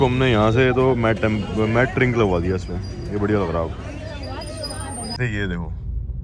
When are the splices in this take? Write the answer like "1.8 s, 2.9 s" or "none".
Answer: 5.2 s

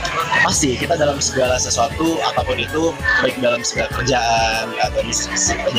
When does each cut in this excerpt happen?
none

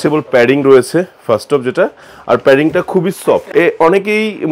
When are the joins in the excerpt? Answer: 3.5 s

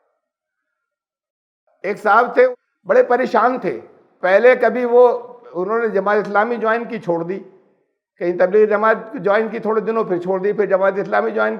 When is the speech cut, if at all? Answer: 2.5 s

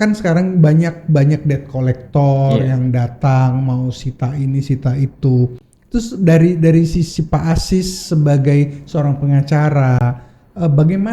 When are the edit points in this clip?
none

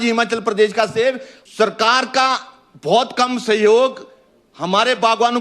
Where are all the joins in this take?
1.3 s

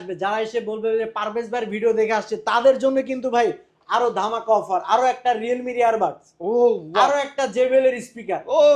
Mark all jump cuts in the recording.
none

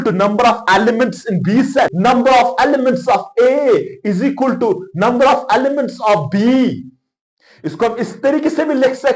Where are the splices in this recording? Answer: 1.9 s

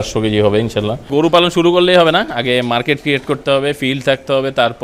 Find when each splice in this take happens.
1.1 s

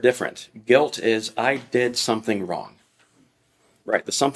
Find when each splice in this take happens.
none

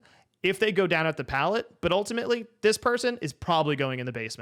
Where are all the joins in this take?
none

